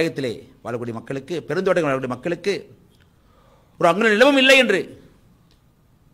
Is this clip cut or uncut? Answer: uncut